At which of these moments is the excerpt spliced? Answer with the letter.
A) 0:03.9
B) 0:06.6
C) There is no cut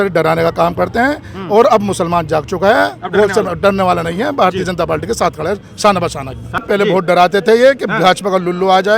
B